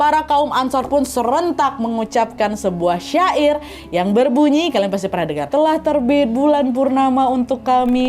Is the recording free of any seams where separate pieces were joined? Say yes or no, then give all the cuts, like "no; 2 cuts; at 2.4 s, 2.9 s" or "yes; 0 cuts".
no; 1 cut; at 5.5 s